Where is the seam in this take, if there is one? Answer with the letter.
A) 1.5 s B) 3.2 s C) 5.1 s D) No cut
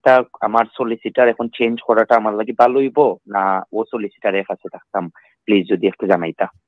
D